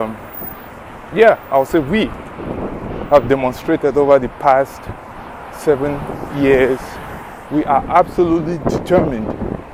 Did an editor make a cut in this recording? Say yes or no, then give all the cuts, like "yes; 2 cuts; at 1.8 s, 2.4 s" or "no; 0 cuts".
no; 0 cuts